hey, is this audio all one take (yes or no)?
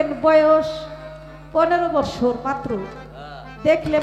yes